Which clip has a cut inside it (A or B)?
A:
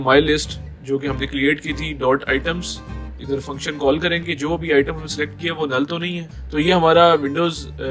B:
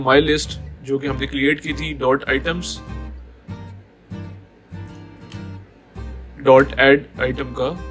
A